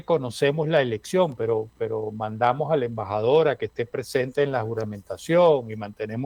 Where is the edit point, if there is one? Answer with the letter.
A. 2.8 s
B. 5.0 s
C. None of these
C